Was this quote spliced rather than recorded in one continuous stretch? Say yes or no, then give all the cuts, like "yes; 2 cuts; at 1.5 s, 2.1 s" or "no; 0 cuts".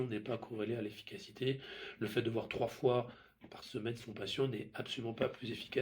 no; 0 cuts